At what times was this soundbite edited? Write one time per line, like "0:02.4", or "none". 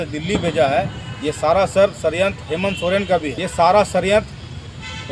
0:03.4